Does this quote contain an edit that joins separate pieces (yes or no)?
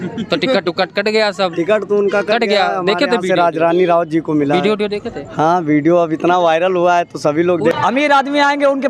yes